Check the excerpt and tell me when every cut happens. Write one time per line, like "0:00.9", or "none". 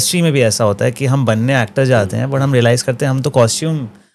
none